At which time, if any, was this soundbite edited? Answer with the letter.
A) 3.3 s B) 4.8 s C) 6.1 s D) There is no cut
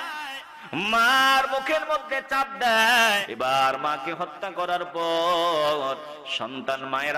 A